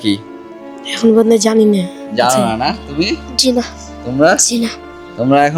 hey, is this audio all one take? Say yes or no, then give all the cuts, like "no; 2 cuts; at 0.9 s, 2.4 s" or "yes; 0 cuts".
yes; 0 cuts